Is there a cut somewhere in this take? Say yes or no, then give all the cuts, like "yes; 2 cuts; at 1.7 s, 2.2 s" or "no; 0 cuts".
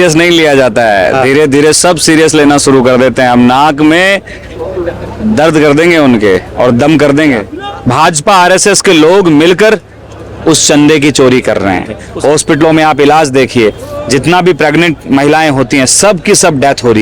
yes; 2 cuts; at 7.5 s, 12.0 s